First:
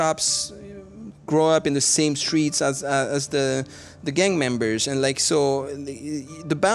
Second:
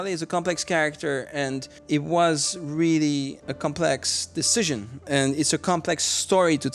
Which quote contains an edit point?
second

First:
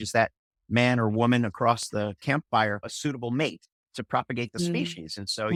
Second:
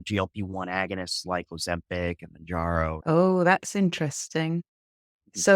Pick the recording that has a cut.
second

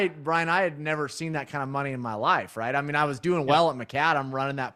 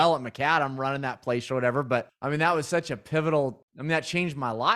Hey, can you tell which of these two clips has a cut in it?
second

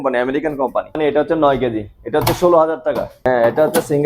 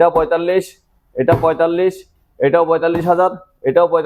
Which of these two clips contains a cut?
first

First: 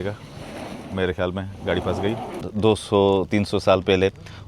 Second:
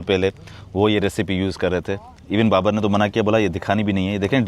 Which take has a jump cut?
first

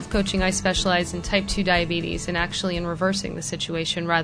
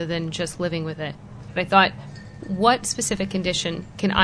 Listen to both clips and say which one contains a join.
second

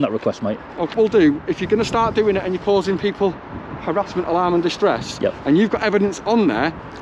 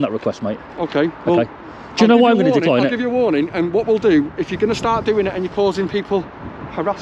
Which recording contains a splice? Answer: first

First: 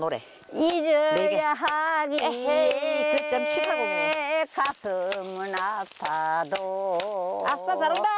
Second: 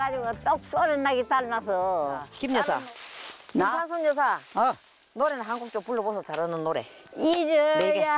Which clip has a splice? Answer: second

